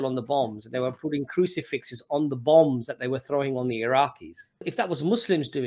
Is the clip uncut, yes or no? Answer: no